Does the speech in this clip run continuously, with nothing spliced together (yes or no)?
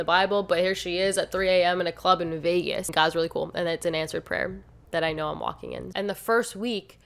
no